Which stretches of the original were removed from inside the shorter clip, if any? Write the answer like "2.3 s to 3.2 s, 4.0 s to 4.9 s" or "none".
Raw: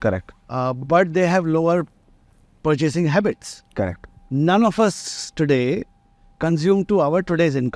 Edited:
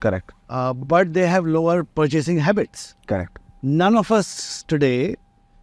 1.9 s to 2.6 s